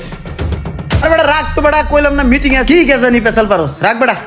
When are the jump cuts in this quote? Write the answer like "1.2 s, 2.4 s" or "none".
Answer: 1.0 s